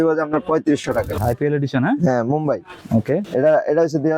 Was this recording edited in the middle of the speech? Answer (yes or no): yes